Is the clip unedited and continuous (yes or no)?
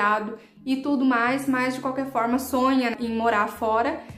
no